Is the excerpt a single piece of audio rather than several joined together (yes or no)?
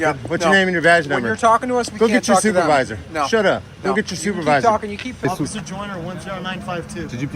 no